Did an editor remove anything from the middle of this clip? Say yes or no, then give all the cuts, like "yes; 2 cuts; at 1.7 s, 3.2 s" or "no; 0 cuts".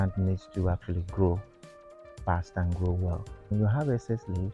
yes; 1 cut; at 3.5 s